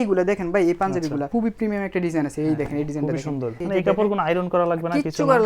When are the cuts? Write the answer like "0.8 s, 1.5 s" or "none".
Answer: 1.3 s, 3.6 s